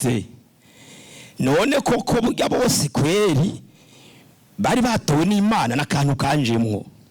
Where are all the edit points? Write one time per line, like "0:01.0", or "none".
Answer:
none